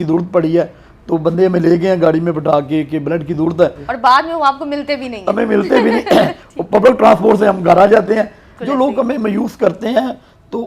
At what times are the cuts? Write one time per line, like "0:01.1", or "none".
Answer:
0:03.9
0:08.5